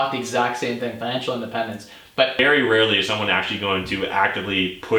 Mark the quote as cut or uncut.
cut